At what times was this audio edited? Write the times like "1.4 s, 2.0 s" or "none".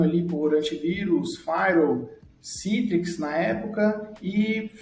none